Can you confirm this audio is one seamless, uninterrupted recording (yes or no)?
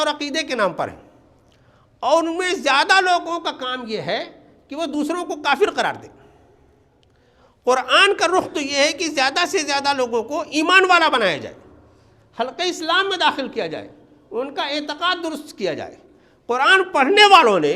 yes